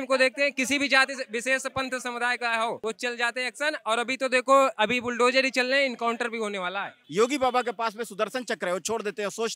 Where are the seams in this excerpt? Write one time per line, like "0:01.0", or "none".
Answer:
0:02.8
0:06.9

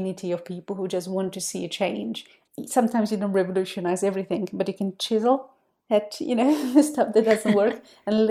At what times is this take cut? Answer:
0:02.4

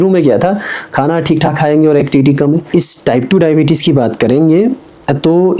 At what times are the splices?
0:02.7

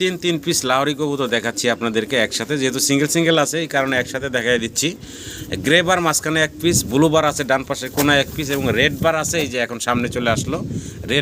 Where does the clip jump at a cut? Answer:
none

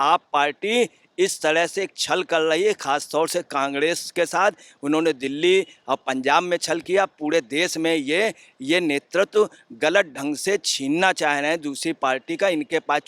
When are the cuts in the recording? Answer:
none

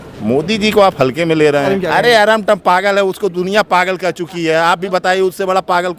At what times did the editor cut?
0:01.7

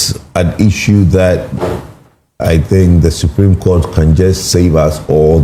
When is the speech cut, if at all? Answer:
none

